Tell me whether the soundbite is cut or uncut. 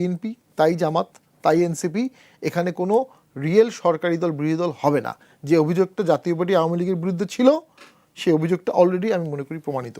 uncut